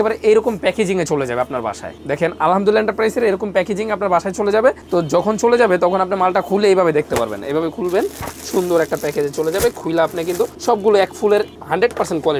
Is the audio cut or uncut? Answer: uncut